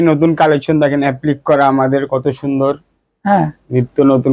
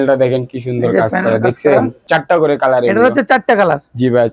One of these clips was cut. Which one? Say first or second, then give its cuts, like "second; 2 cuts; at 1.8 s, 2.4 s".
second; 1 cut; at 2.0 s